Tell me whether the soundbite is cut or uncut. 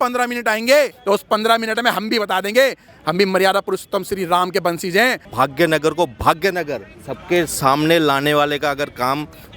cut